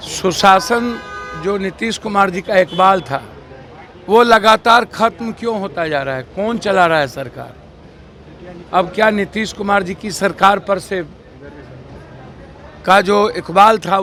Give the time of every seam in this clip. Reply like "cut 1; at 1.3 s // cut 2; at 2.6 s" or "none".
none